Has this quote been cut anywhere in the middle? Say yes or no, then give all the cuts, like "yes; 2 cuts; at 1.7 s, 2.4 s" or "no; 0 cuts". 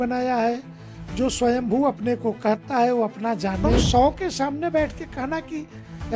yes; 1 cut; at 3.8 s